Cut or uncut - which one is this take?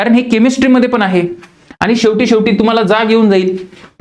uncut